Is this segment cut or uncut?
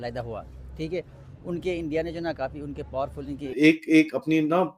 cut